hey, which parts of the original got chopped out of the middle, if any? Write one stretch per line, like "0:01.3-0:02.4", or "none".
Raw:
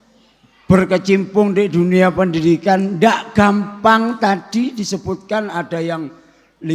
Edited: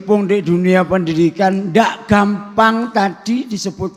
none